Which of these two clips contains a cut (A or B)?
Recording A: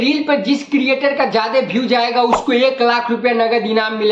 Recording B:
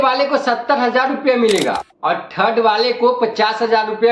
B